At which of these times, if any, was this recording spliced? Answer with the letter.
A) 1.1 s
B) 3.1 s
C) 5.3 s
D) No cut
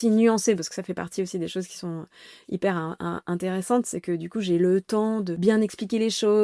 C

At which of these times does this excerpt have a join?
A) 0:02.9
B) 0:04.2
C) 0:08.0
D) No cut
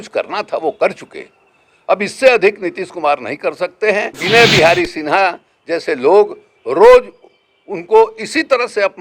B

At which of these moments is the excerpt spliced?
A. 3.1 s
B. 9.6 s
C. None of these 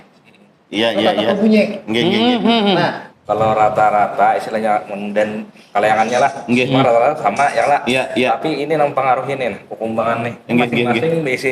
A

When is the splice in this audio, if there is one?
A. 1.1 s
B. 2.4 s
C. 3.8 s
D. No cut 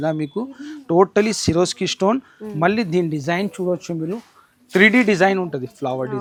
D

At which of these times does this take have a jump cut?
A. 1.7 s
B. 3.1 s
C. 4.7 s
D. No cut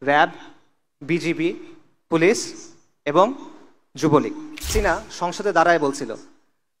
C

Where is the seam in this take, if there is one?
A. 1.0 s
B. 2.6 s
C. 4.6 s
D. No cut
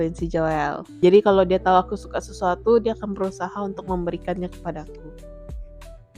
A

